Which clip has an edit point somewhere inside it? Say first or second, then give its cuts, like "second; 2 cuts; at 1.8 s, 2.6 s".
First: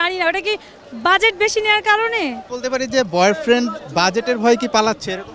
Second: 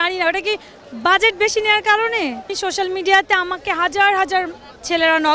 second; 1 cut; at 2.5 s